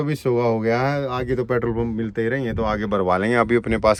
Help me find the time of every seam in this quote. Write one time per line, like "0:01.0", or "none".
none

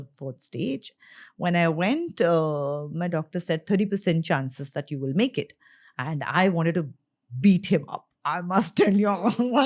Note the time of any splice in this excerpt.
none

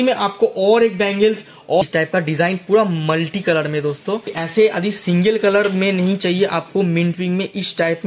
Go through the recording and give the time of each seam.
0:01.8
0:04.4

